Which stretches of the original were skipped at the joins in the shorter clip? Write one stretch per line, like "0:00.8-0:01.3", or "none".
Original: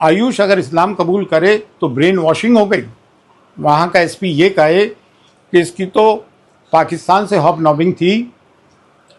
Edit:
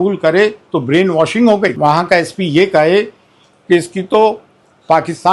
0:02.8-0:03.6